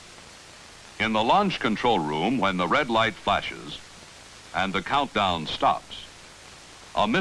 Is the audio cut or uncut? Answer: uncut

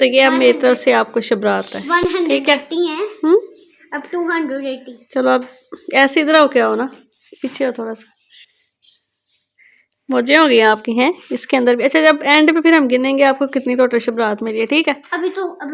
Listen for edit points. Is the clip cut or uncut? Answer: uncut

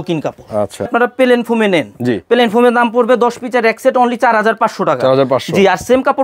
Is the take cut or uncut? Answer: cut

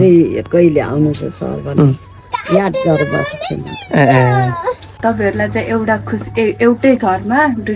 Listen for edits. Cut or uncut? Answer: cut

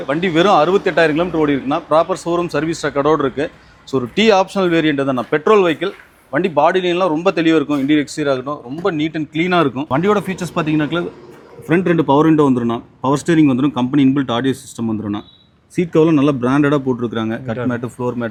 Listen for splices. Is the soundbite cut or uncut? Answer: uncut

